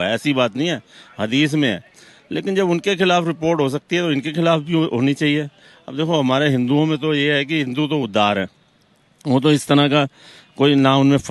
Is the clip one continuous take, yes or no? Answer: yes